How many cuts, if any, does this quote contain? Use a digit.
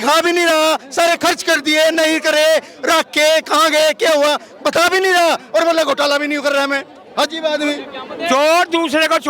0